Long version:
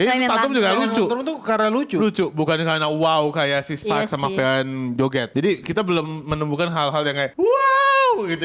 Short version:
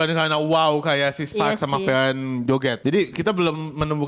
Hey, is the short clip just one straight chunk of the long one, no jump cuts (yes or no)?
yes